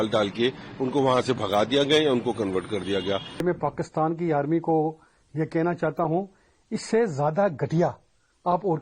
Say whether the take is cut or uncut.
cut